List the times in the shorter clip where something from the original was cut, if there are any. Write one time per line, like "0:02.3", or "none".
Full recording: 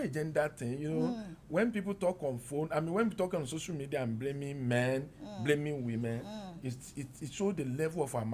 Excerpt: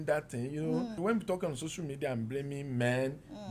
0:01.0